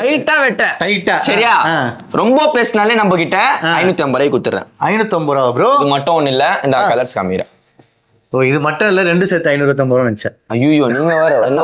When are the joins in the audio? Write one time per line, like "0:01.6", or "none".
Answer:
none